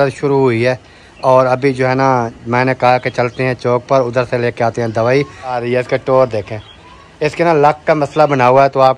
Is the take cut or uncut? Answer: cut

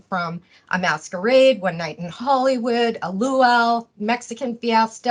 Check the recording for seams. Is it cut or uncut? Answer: uncut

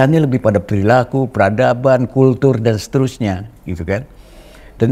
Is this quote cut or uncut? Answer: uncut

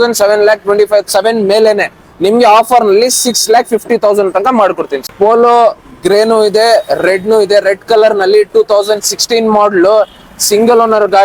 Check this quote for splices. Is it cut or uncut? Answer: uncut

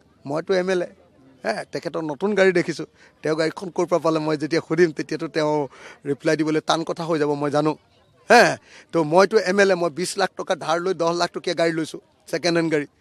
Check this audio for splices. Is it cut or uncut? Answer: uncut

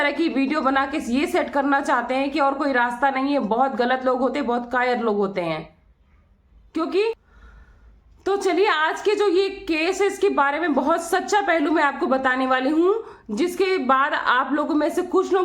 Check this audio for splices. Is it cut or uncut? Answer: cut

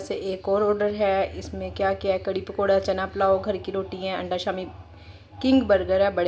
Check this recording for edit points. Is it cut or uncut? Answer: uncut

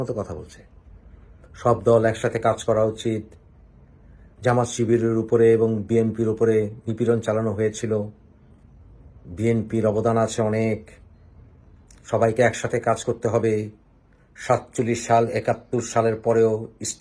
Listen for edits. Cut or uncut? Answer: uncut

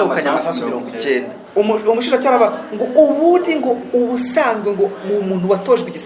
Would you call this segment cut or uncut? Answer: cut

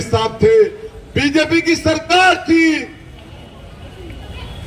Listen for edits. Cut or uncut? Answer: uncut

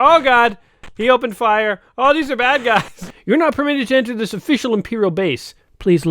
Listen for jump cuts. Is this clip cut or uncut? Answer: cut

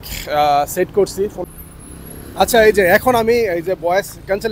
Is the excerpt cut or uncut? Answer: cut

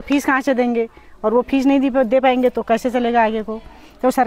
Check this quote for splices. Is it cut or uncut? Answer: uncut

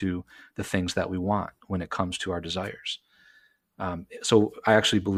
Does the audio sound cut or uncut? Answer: uncut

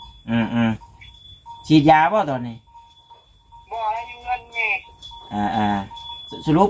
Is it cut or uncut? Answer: uncut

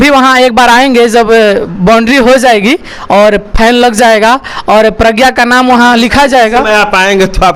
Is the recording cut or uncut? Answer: uncut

